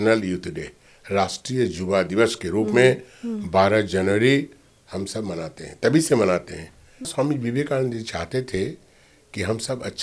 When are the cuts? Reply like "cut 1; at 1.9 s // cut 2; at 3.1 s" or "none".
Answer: cut 1; at 7.1 s